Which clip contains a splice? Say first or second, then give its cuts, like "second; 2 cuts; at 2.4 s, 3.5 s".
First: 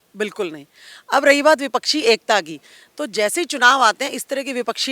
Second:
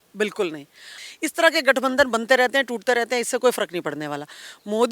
second; 1 cut; at 0.9 s